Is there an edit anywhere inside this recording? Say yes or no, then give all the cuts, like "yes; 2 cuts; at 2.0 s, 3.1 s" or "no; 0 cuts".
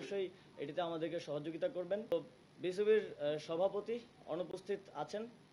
yes; 1 cut; at 2.1 s